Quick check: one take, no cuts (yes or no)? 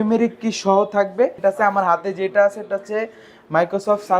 no